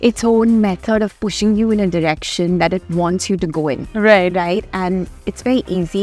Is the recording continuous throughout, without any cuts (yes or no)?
yes